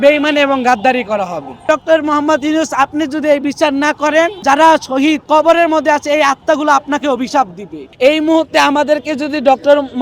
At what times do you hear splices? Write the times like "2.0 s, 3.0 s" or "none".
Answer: 1.5 s, 4.4 s, 5.2 s, 7.8 s